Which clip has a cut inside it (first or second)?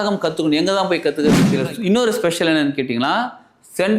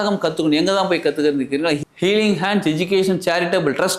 first